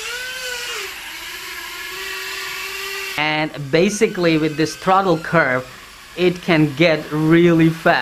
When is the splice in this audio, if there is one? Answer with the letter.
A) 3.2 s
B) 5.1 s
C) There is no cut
A